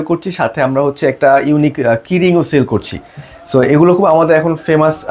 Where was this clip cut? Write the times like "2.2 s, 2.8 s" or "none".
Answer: none